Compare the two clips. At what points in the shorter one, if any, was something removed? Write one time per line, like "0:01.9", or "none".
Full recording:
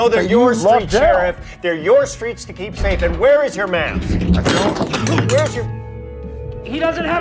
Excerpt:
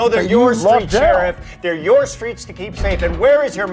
none